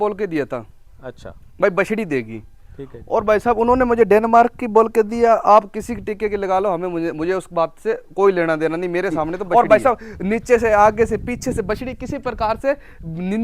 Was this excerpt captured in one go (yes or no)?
no